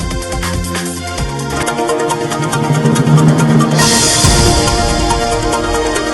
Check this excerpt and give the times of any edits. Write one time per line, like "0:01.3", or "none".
none